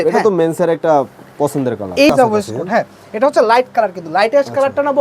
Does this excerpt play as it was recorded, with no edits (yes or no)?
no